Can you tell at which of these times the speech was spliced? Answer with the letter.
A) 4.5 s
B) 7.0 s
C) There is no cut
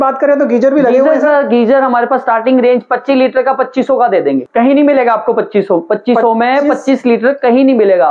C